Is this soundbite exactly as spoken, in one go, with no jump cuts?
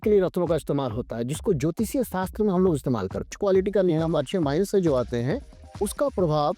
no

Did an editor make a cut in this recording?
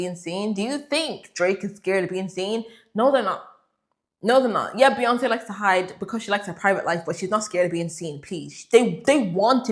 no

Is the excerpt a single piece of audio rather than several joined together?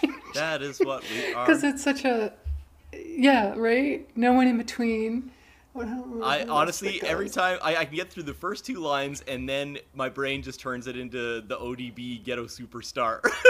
no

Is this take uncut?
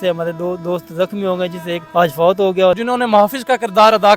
no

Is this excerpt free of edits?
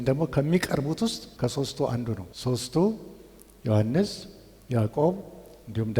no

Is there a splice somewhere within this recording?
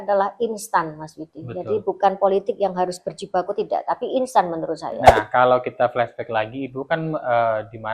yes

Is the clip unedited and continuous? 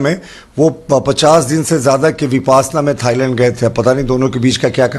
yes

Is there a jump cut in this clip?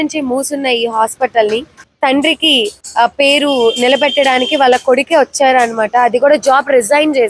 yes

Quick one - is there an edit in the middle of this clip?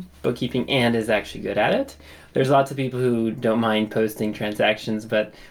no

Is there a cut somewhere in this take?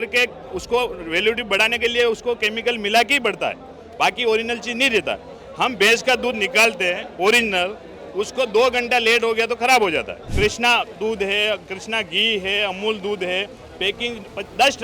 yes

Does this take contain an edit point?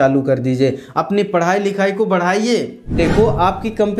yes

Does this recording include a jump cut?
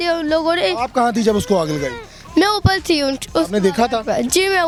no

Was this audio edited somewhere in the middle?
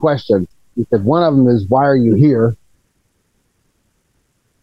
no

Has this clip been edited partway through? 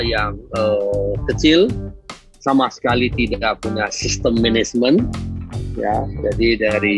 no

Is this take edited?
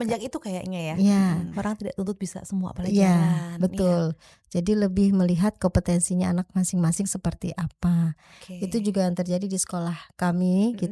no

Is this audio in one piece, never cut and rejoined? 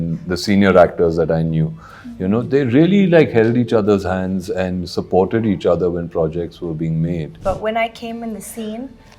no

